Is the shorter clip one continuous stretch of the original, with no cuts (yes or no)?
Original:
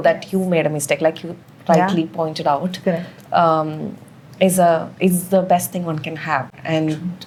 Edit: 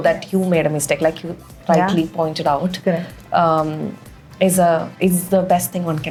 yes